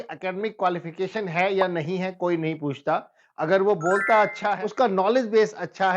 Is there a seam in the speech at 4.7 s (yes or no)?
yes